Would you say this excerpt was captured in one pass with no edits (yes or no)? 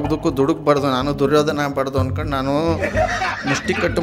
yes